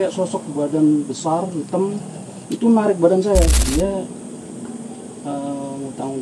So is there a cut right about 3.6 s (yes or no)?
yes